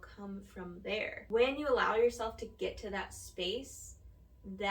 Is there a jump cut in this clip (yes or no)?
yes